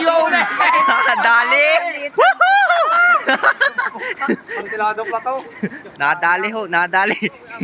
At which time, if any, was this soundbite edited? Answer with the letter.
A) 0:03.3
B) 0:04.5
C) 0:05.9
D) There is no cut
C